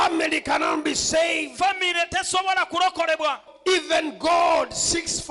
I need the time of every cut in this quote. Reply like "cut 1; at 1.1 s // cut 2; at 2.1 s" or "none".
cut 1; at 3.5 s